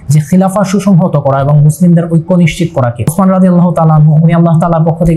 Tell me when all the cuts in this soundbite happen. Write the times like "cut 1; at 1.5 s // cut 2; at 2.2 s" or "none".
cut 1; at 3.1 s